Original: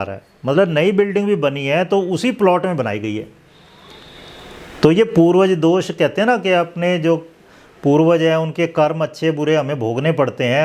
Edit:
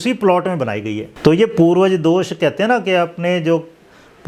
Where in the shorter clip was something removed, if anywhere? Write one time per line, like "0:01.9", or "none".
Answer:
0:01.1